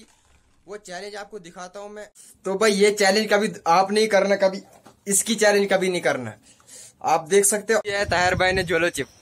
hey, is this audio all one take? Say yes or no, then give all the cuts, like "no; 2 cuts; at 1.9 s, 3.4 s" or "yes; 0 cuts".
no; 2 cuts; at 2.3 s, 7.9 s